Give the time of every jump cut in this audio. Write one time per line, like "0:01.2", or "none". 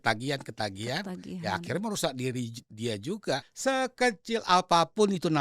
0:03.5